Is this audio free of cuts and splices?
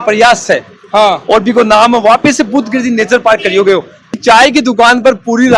no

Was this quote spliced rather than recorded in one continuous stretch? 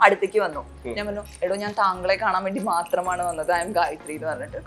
yes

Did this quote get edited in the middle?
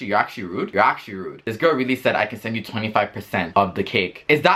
no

